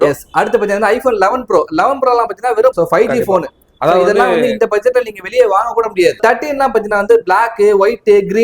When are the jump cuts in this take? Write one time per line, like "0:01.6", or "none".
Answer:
0:02.7
0:06.2